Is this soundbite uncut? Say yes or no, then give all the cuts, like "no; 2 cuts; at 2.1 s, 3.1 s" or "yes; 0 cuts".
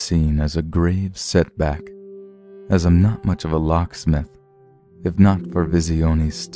yes; 0 cuts